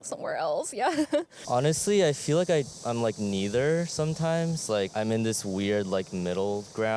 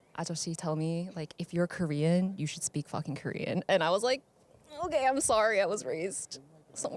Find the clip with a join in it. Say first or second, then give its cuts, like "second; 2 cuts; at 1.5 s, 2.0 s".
first; 1 cut; at 1.4 s